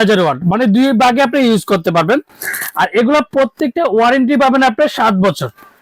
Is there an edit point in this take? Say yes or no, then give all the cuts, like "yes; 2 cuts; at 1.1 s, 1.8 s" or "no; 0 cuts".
no; 0 cuts